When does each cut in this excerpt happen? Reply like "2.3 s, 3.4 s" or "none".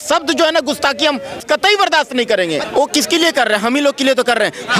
1.4 s, 2.7 s

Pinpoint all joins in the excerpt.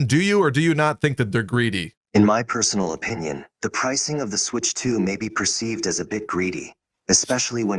1.9 s

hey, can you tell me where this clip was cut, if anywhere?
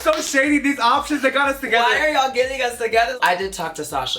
3.2 s

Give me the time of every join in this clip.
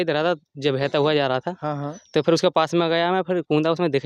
none

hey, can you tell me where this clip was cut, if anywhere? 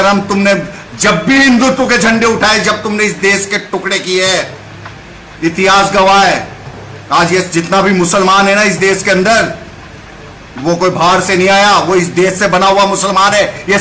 none

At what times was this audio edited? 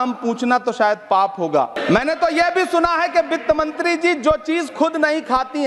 1.8 s

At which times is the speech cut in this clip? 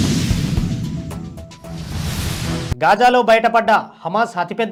none

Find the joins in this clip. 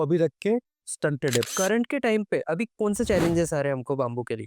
1.5 s

